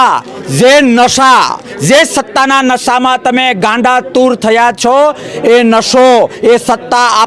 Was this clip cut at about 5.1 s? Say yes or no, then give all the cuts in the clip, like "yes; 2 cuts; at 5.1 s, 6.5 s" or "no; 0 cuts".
no; 0 cuts